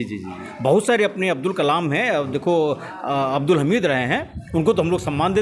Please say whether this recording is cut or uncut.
uncut